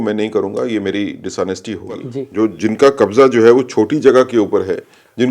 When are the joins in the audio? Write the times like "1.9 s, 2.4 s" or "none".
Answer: 2.2 s